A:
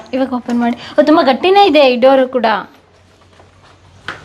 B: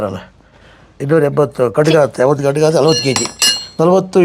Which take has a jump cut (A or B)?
B